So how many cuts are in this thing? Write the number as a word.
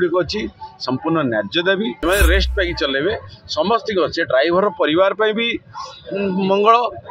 one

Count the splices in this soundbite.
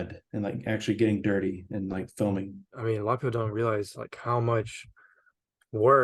one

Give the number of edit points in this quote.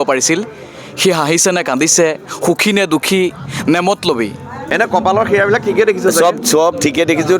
one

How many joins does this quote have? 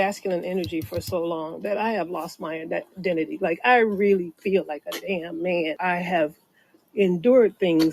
one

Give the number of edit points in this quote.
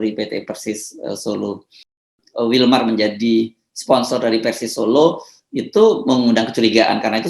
one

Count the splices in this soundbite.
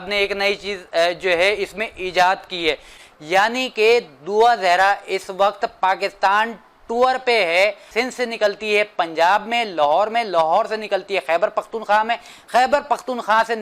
two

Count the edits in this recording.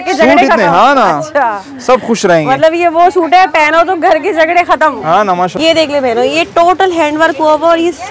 one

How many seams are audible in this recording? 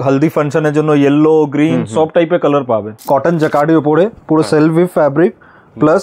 one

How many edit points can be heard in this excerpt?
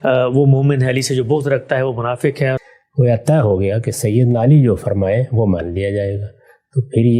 one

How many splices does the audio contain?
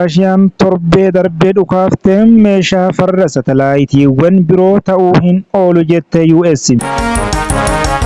one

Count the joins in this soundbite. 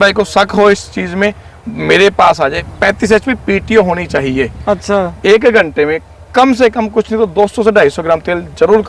two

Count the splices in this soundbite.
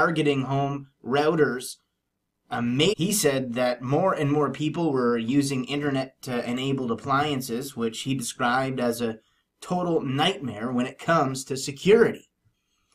zero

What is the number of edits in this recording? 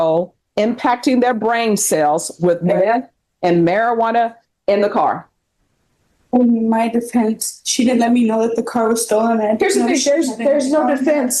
zero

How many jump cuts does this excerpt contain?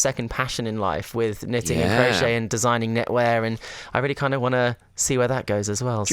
zero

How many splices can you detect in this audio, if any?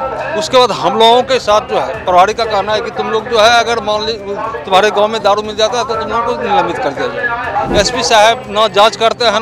one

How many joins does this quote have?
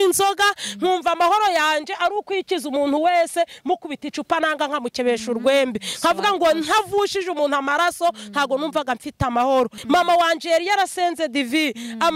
one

